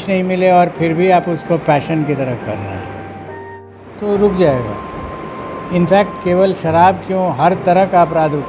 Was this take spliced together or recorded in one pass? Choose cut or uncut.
cut